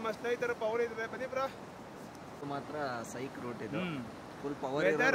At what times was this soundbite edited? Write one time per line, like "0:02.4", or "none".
0:02.4